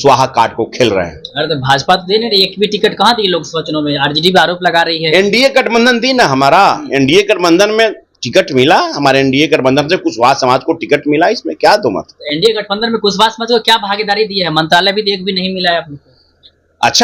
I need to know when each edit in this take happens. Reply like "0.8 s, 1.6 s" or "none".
none